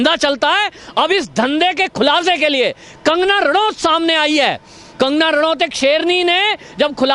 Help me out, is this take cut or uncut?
uncut